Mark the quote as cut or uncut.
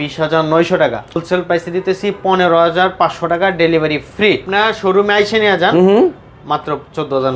cut